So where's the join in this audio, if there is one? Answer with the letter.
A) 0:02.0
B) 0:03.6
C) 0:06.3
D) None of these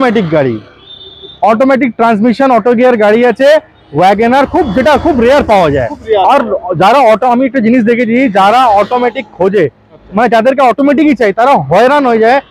D